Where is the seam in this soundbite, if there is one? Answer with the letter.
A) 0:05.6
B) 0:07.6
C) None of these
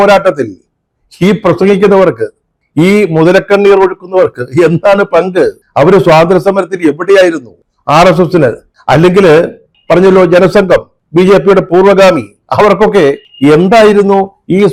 C